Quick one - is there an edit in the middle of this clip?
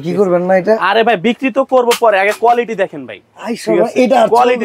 no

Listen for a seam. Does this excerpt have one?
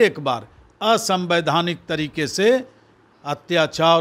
no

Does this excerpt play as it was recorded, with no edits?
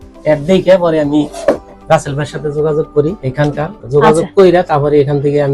yes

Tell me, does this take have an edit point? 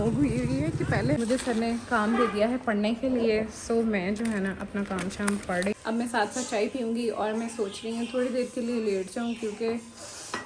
yes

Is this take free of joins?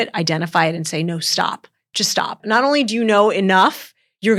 yes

